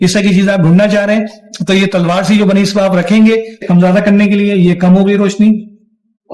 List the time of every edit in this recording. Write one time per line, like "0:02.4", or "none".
0:03.6